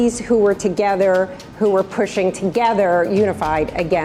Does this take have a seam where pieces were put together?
no; 0 cuts

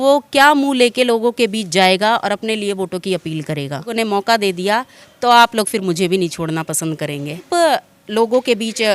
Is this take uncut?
no; 2 cuts; at 3.9 s, 7.5 s

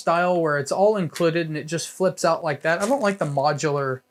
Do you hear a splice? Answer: no; 0 cuts

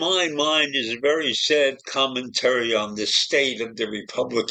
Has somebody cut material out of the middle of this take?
no; 0 cuts

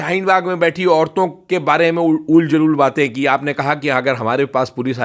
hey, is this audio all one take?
yes; 0 cuts

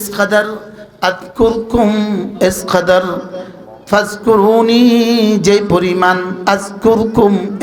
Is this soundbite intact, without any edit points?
yes; 0 cuts

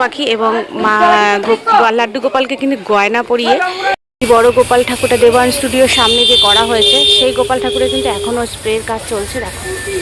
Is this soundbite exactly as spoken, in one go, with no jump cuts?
no; 1 cut; at 4.0 s

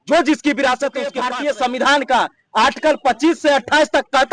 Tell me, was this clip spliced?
yes; 1 cut; at 1.2 s

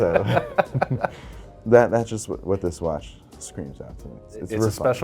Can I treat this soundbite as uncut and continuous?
no; 1 cut; at 4.1 s

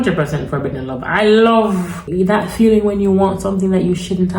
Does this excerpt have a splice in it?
yes; 1 cut; at 2.0 s

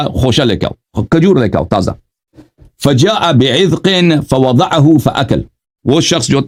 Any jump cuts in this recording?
no; 0 cuts

